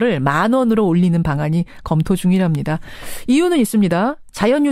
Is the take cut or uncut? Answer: uncut